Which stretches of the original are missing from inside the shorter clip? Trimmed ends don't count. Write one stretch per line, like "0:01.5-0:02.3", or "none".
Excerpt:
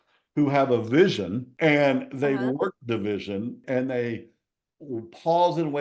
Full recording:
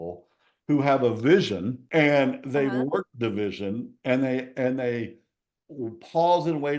0:03.9-0:04.5